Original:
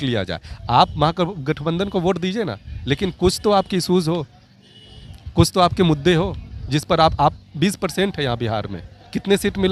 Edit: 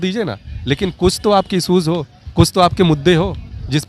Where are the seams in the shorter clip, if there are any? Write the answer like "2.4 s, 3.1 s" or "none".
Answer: 2.2 s